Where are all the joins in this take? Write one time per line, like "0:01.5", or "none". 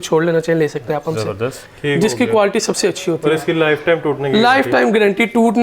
0:01.6